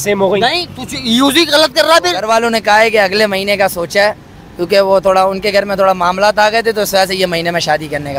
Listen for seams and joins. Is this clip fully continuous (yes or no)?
no